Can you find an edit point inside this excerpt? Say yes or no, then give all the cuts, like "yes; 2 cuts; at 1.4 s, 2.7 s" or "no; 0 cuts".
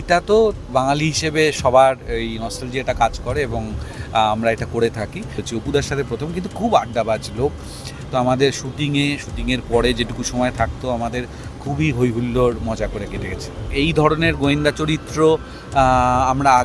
yes; 2 cuts; at 5.4 s, 13.7 s